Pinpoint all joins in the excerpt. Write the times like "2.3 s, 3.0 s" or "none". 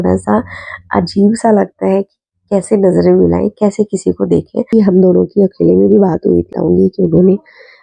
4.7 s, 6.5 s

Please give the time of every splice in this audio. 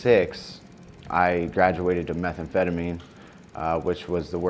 none

